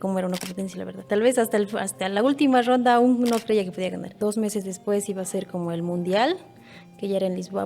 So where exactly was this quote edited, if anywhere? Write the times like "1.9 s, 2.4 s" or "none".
1.0 s, 4.2 s